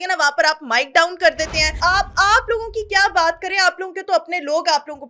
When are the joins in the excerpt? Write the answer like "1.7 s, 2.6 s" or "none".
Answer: 1.7 s